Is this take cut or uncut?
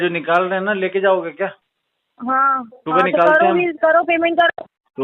uncut